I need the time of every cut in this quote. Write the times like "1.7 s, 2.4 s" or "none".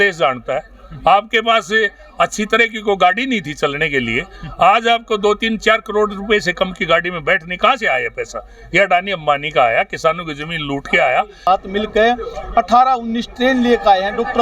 11.5 s